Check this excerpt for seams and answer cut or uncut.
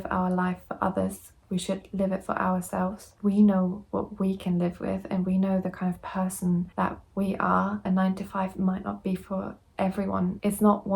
cut